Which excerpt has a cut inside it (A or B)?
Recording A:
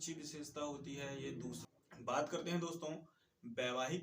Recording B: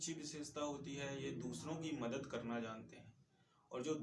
A